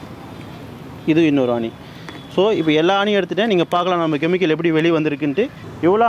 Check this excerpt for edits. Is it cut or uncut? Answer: uncut